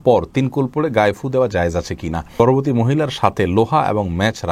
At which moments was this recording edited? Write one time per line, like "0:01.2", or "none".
0:02.4